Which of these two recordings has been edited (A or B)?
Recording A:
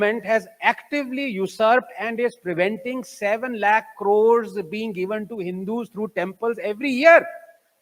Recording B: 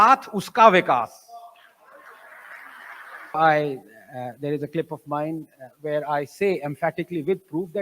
B